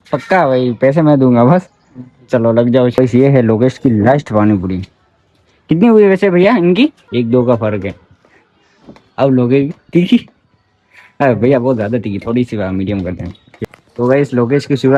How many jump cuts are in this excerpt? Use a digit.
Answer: 3